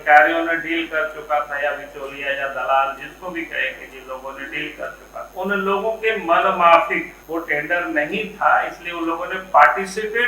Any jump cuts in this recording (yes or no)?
yes